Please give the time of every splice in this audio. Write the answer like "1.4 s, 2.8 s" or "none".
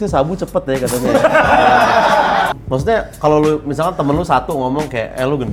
2.5 s